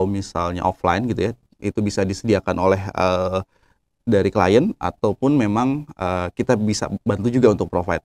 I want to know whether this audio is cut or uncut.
uncut